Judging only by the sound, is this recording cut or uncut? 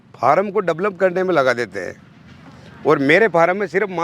uncut